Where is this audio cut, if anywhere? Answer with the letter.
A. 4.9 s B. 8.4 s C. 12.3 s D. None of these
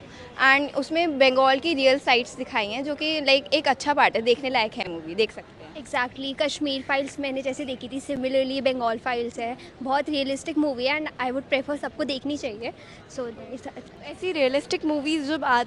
D